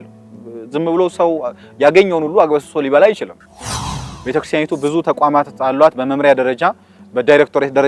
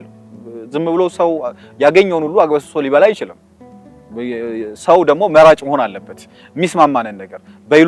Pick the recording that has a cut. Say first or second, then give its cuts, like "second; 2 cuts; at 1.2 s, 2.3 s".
first; 1 cut; at 4.0 s